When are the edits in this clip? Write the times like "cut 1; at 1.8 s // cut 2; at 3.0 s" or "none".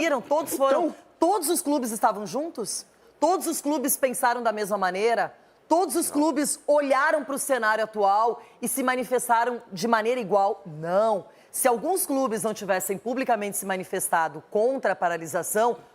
none